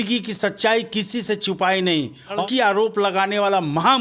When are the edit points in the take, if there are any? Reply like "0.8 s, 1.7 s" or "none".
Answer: 2.4 s